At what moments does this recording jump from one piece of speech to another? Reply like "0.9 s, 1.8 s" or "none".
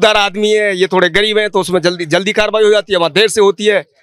none

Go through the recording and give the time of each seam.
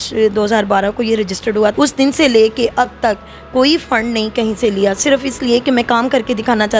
1.7 s

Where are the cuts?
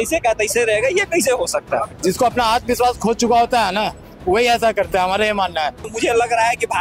1.9 s, 5.9 s

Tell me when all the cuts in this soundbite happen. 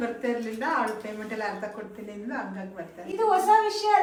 none

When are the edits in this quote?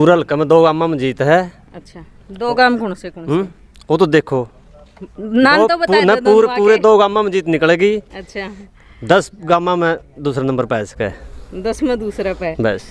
none

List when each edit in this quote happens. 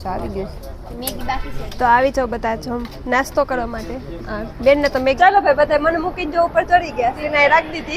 0.9 s, 5.2 s, 7.2 s

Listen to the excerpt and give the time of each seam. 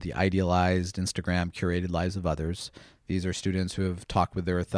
none

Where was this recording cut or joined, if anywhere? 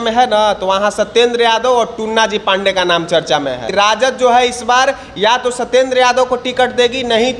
3.7 s

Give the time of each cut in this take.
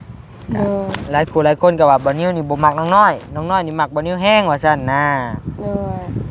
none

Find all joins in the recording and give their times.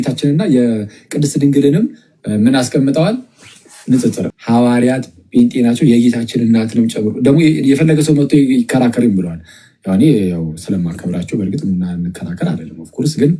4.3 s

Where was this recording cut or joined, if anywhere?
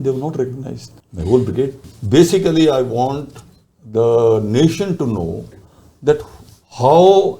1.9 s

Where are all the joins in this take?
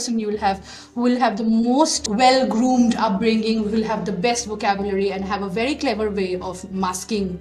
2.0 s

